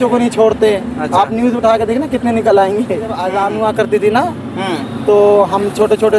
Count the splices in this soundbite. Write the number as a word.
one